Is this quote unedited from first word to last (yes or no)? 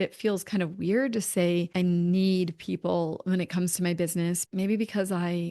no